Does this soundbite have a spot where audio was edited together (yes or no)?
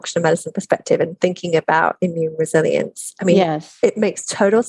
no